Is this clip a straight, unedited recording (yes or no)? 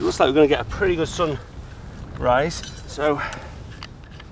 yes